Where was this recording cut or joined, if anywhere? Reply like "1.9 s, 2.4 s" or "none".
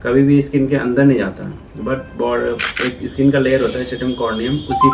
none

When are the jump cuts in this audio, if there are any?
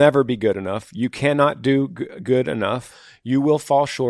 2.9 s

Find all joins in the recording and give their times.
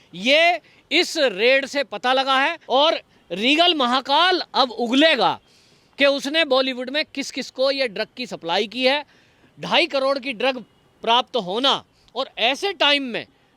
2.6 s

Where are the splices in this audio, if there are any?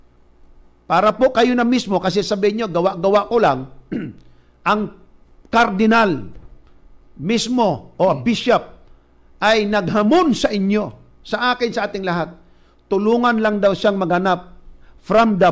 4.9 s, 6.4 s, 8.7 s, 12.7 s

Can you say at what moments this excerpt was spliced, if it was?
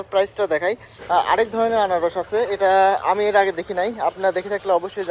0.9 s

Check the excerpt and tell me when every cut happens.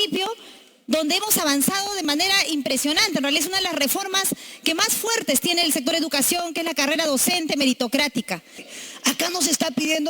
8.6 s

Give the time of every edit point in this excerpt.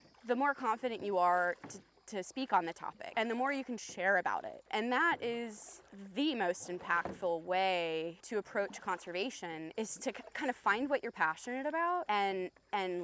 2.9 s

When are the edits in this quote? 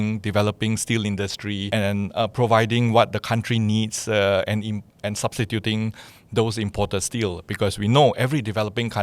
1.7 s

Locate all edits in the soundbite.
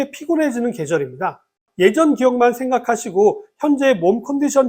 1.6 s

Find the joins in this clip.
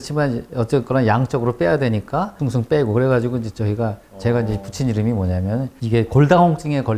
none

